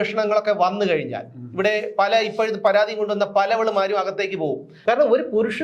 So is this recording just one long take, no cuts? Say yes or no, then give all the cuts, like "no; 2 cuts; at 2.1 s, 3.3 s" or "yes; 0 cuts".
no; 1 cut; at 4.7 s